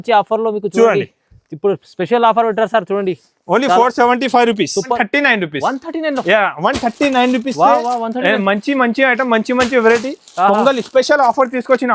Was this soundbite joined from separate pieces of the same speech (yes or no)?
yes